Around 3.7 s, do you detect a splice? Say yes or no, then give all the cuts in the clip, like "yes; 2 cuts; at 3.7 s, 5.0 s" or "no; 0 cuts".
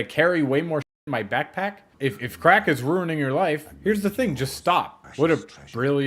no; 2 cuts; at 1.9 s, 5.0 s